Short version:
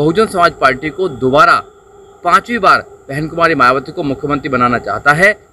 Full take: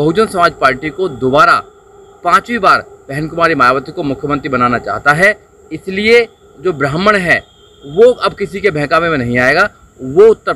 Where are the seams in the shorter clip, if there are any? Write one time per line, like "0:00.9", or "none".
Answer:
none